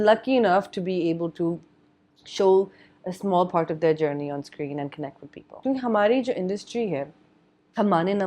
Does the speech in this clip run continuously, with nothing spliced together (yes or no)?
no